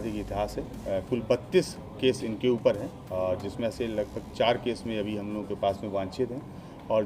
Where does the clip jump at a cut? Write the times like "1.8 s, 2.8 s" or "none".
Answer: none